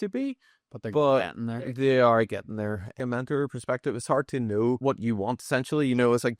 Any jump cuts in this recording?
yes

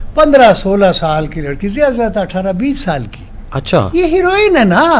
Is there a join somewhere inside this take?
no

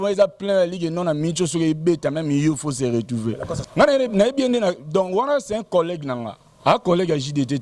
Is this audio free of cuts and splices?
no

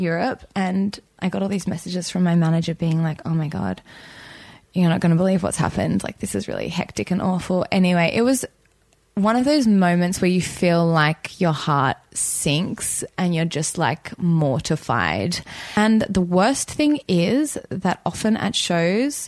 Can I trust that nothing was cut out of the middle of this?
no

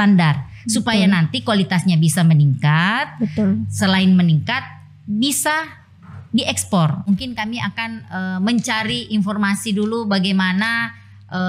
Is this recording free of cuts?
no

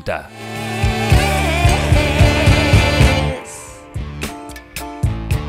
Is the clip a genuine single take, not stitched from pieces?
no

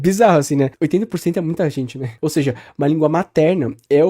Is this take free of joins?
no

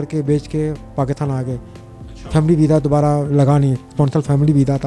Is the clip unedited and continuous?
yes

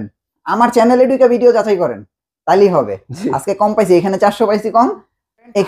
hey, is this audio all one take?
yes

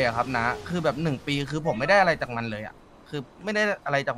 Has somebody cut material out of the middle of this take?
no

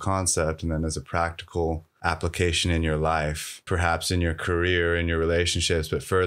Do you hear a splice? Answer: yes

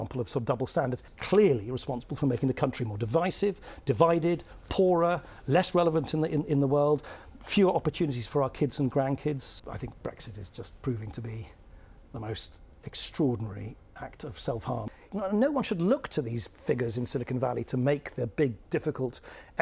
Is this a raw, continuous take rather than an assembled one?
no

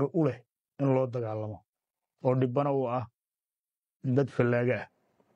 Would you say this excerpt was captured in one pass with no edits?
yes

